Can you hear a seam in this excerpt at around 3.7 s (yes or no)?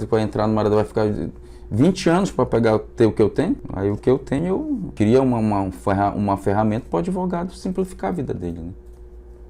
yes